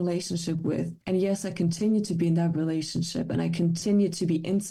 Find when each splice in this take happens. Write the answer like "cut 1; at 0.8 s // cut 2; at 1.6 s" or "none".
none